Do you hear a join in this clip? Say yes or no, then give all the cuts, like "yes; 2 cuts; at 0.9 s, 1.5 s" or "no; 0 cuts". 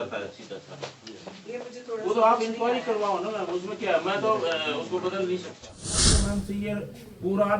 yes; 1 cut; at 6.1 s